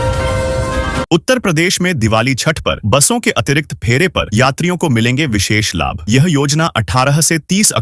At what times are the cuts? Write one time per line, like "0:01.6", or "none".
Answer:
0:01.0